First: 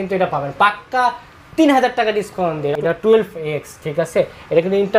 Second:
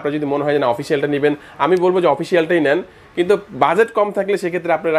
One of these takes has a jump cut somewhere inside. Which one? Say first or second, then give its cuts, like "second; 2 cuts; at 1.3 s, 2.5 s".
first; 1 cut; at 2.8 s